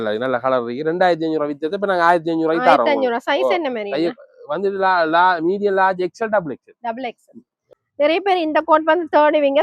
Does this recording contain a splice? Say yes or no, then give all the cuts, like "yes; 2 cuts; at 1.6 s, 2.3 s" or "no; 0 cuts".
yes; 1 cut; at 7.7 s